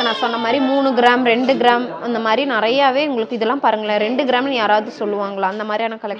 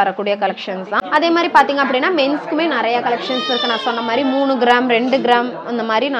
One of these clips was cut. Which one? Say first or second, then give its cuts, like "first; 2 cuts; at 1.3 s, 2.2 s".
second; 1 cut; at 1.1 s